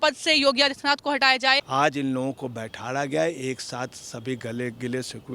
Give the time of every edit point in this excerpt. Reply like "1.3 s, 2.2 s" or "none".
1.7 s